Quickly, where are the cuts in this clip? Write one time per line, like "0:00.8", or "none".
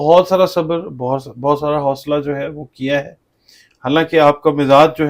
none